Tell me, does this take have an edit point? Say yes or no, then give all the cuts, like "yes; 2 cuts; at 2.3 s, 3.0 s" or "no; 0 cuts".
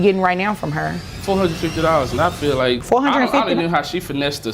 yes; 2 cuts; at 1.1 s, 2.8 s